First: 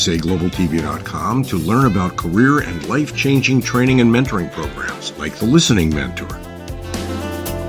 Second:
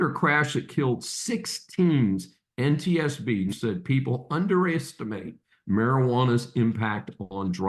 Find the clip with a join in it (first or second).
second